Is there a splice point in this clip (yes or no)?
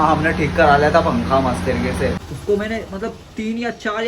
yes